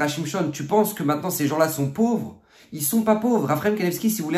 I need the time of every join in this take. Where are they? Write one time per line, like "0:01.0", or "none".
none